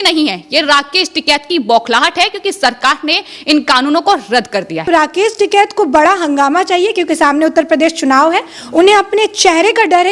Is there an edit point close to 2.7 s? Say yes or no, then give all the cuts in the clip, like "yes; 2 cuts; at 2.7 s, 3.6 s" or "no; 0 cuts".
no; 1 cut; at 4.9 s